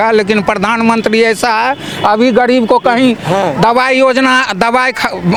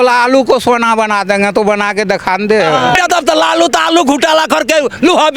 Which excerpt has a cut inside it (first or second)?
second